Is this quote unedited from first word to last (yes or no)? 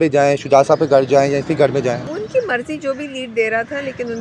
no